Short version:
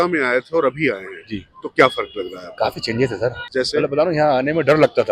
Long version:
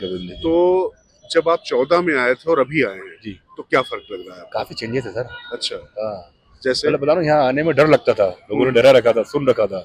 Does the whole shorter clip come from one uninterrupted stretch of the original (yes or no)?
no